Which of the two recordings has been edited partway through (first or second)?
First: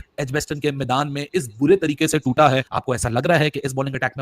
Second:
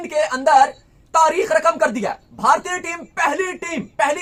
first